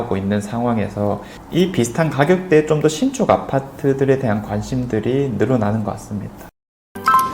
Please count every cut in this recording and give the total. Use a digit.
1